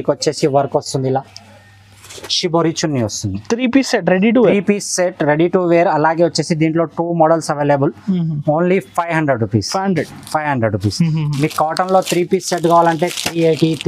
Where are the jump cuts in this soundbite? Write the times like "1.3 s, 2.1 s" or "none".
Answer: none